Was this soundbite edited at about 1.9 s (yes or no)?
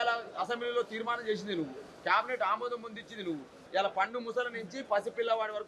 no